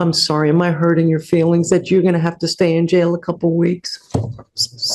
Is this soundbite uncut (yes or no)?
yes